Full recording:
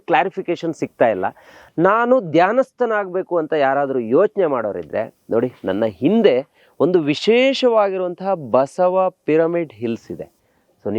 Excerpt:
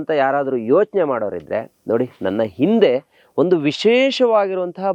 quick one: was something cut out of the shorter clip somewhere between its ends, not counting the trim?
no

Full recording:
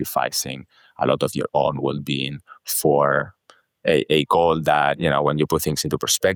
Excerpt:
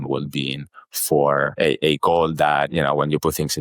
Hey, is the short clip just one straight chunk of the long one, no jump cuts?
no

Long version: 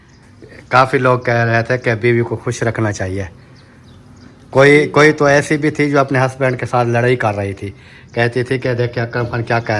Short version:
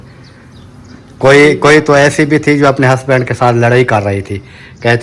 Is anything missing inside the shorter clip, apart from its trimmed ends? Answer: no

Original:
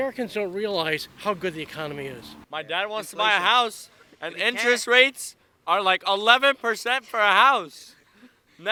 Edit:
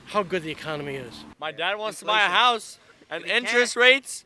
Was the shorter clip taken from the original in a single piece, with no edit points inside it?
yes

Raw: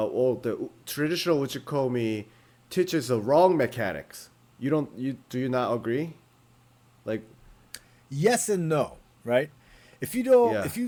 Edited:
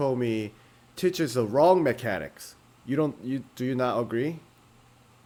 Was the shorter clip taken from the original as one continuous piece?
yes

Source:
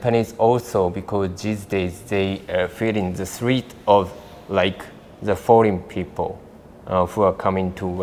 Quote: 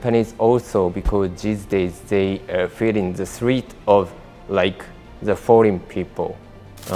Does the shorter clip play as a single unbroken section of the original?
yes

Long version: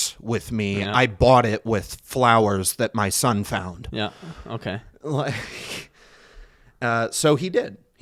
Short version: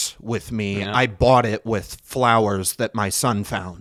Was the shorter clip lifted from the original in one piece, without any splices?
yes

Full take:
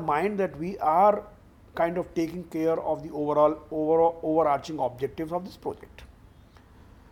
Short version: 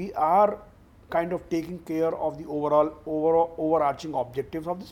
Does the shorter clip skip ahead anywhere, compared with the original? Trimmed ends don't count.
no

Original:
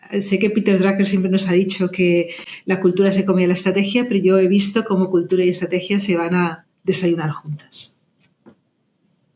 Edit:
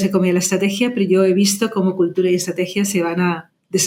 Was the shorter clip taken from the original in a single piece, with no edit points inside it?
yes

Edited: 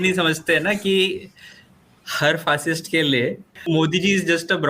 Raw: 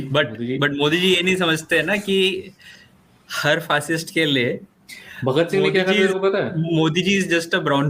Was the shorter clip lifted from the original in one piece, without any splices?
no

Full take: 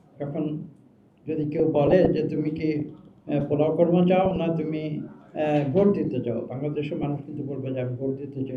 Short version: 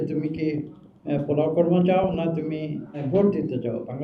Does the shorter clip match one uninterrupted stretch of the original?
no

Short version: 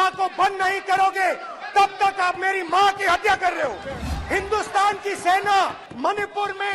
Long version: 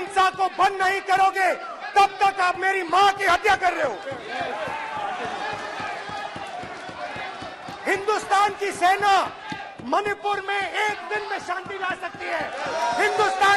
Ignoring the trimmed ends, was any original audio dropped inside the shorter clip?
yes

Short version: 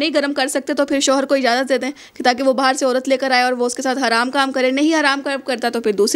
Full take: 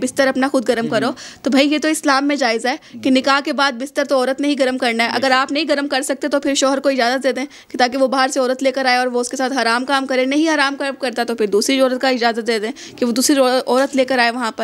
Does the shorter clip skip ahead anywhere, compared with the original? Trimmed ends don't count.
no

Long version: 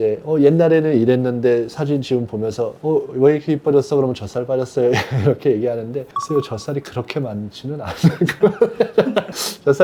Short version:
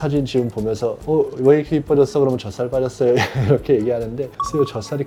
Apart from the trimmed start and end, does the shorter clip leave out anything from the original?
no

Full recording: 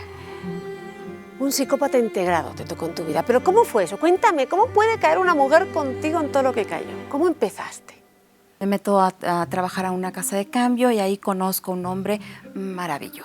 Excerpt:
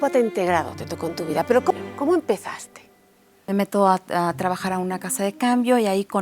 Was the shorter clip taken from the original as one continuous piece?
no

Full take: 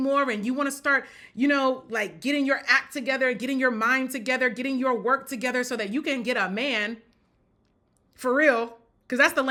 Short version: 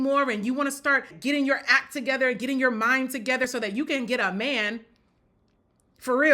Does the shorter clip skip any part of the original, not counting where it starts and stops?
yes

